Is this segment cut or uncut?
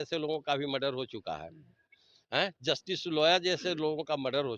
uncut